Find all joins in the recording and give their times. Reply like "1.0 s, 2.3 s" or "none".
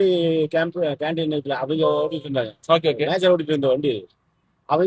none

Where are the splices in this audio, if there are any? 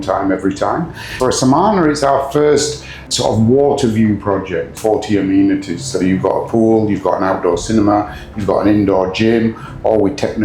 1.0 s, 3.1 s, 4.7 s

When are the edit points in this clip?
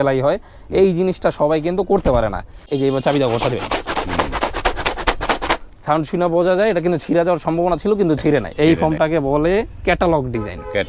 2.7 s, 8.5 s

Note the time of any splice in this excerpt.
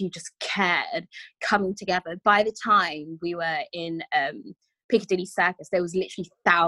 none

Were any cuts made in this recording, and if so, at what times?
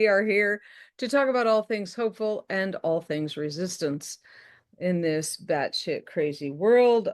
none

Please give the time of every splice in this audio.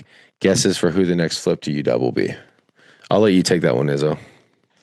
none

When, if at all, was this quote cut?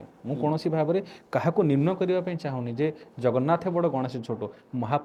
none

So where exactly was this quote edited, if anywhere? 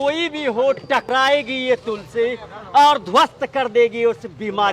1.1 s

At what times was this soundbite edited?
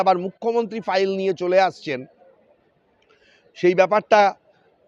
none

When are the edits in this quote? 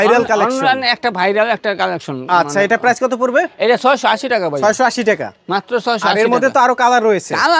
none

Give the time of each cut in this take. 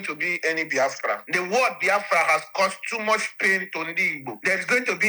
1.2 s

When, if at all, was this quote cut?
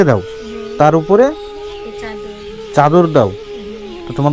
none

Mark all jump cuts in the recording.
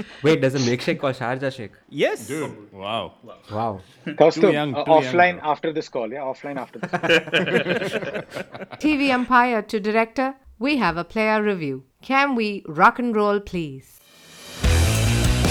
8.7 s

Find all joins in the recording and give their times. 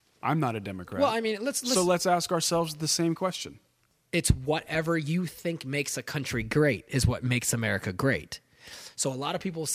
3.9 s

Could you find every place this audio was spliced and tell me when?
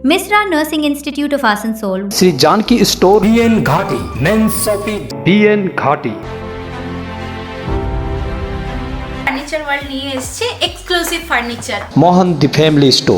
5.1 s, 6.2 s, 9.2 s

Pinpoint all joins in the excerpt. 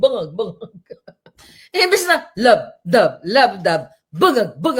none

